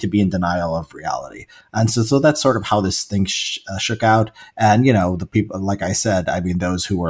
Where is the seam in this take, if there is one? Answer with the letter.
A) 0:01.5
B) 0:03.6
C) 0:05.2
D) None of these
D